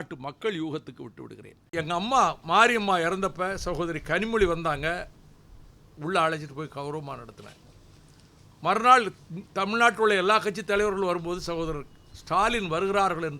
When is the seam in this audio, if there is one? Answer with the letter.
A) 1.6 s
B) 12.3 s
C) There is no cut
A